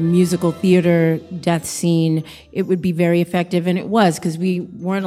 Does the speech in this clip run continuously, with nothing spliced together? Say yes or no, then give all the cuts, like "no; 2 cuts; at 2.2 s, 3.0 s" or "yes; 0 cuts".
yes; 0 cuts